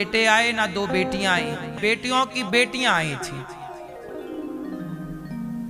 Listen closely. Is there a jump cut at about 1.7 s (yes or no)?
yes